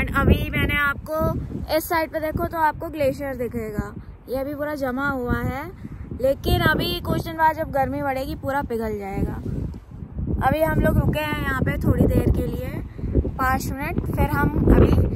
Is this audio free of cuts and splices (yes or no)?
yes